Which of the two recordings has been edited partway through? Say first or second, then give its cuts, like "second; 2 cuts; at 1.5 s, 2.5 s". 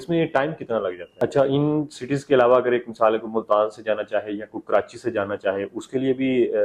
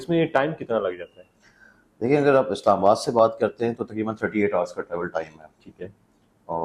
first; 1 cut; at 1.2 s